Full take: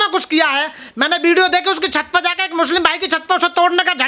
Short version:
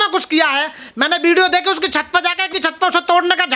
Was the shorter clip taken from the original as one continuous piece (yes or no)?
no